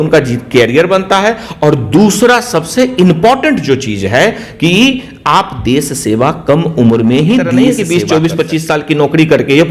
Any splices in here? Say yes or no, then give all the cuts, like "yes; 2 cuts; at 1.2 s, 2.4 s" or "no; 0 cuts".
yes; 1 cut; at 7.7 s